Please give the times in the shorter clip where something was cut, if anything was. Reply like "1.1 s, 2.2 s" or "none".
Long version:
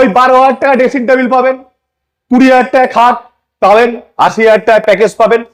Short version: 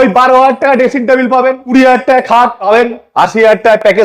1.6 s, 2.6 s